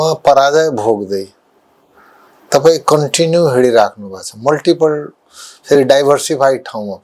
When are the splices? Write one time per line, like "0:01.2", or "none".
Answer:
none